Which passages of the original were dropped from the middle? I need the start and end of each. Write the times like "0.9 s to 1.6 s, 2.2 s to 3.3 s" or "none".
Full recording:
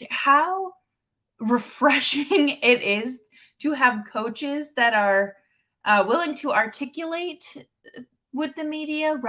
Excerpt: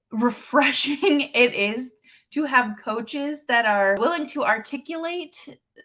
5.3 s to 6.1 s